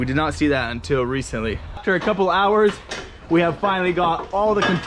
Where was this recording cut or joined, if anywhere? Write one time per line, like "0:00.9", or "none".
0:01.8